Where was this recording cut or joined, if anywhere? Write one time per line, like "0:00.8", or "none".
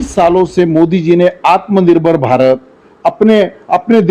none